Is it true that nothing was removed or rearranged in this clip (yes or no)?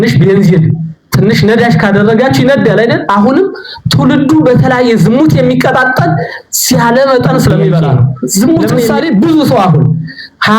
no